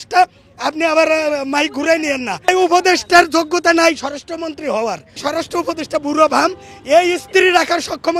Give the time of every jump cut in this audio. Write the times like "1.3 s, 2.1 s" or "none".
2.5 s, 5.2 s